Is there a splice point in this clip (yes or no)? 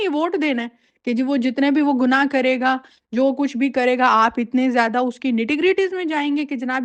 no